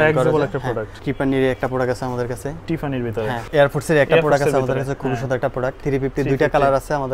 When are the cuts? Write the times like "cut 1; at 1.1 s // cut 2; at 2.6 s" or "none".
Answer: cut 1; at 1.0 s // cut 2; at 3.4 s // cut 3; at 5.8 s